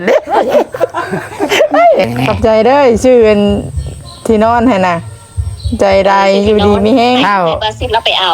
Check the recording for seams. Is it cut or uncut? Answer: cut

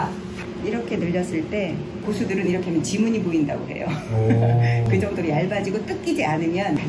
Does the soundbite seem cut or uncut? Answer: cut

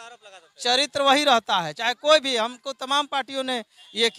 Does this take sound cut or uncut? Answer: uncut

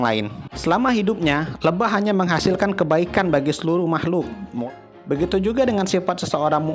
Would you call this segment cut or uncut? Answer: cut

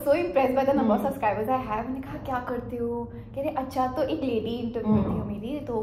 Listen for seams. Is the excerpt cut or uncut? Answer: uncut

